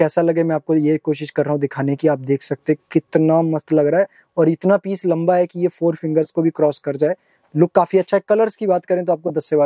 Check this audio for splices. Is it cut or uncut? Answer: uncut